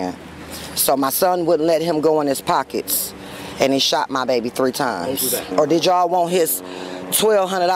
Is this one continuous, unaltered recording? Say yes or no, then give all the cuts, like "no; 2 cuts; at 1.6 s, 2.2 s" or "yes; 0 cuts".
no; 1 cut; at 5.3 s